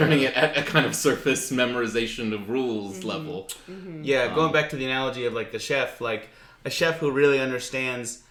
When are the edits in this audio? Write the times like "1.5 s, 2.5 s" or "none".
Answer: none